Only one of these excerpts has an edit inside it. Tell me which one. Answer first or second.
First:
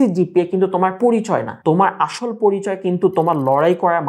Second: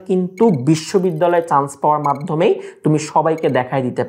first